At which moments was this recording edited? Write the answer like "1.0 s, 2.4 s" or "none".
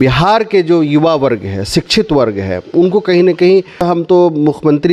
3.9 s